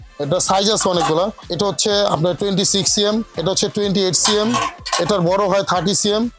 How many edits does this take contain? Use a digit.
2